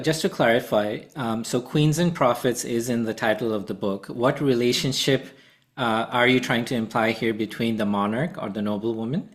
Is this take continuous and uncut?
yes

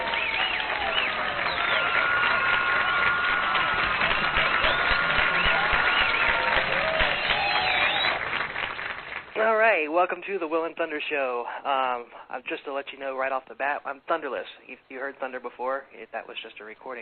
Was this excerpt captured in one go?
no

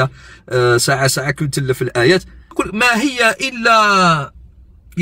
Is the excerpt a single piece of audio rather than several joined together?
no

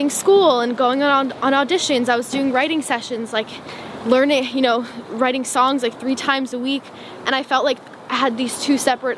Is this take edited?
no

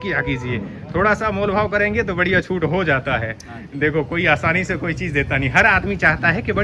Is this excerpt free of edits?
yes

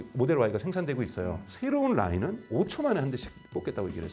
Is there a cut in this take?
yes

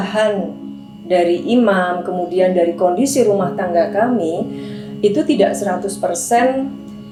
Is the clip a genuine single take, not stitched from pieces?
yes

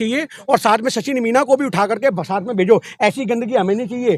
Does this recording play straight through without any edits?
yes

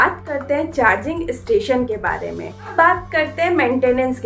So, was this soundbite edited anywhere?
yes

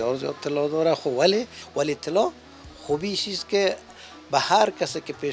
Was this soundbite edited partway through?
yes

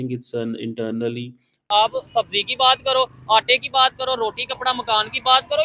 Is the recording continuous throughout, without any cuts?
no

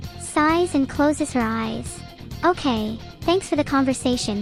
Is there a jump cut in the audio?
no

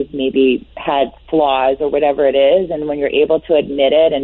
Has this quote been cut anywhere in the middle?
no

